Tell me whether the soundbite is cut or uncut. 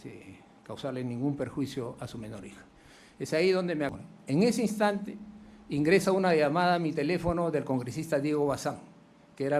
cut